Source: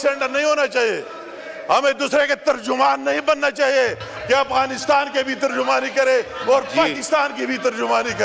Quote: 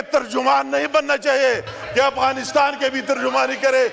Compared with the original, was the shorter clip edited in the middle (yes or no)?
no